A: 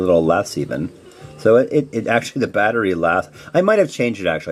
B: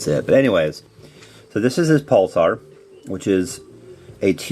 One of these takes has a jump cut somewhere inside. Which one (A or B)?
B